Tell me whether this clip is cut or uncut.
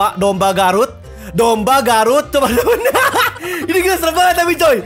uncut